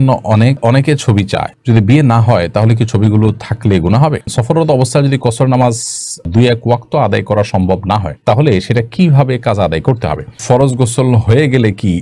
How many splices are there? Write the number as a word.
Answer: two